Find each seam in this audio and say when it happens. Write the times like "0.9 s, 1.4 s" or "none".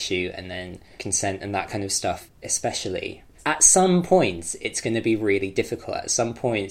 0.9 s, 2.3 s, 3.3 s